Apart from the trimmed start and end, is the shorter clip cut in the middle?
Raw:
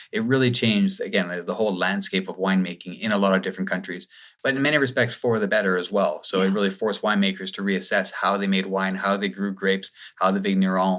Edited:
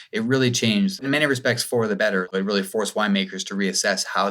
yes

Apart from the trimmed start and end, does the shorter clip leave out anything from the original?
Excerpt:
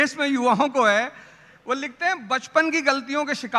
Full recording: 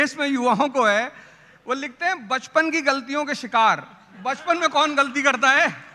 no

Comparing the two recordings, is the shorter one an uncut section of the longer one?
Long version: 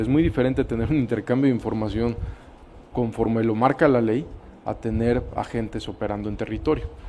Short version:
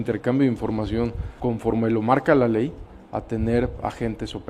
no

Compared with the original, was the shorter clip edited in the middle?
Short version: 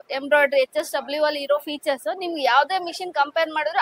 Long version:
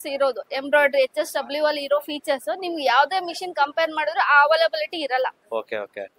no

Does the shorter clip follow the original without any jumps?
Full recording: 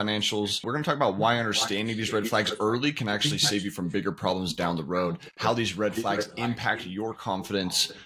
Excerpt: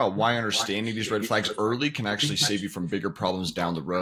yes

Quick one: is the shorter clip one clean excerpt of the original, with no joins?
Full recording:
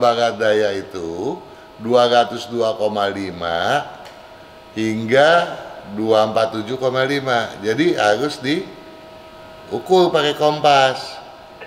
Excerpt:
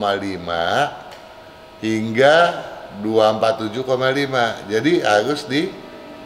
yes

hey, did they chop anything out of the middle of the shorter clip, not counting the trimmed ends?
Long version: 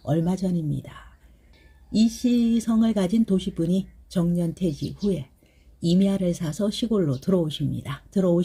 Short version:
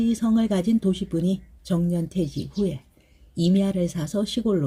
no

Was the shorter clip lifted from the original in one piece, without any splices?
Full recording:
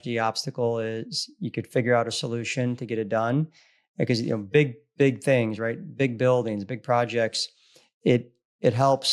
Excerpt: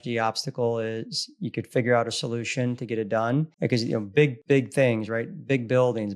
no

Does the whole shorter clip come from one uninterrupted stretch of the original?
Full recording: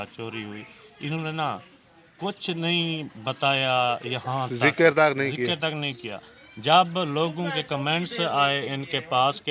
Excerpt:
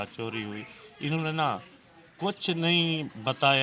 yes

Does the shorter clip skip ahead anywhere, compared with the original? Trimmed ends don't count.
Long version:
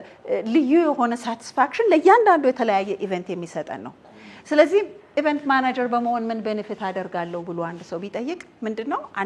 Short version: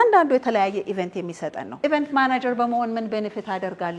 yes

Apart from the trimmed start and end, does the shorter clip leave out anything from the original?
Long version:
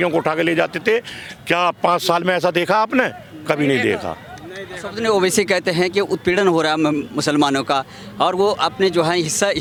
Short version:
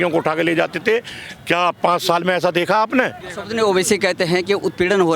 yes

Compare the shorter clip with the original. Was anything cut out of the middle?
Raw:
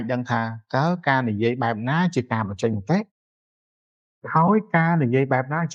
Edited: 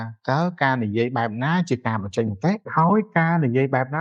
yes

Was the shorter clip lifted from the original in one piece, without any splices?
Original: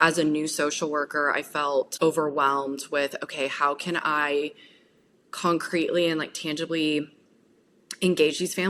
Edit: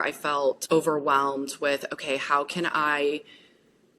yes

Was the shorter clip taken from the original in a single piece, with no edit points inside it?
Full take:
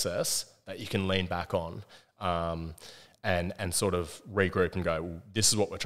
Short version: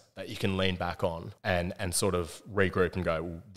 no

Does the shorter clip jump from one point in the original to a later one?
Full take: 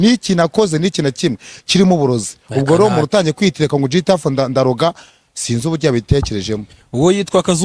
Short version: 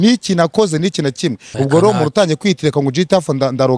yes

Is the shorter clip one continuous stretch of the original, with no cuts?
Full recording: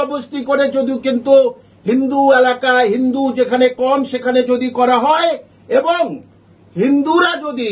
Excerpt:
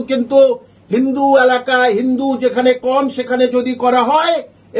yes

